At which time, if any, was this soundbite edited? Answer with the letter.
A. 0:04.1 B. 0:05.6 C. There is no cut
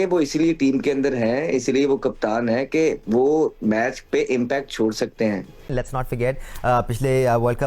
B